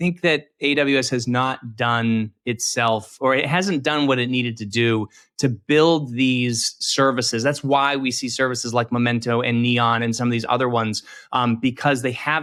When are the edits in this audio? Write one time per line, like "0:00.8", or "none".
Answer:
none

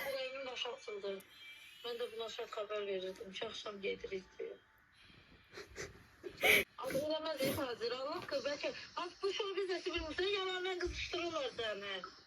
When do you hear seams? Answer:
0:06.7

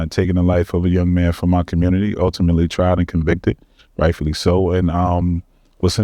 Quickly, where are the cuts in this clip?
none

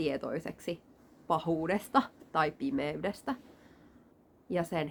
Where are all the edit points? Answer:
none

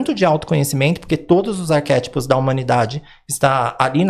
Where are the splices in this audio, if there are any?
none

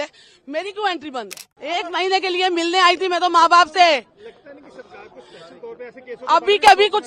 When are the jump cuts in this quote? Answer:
0:01.4

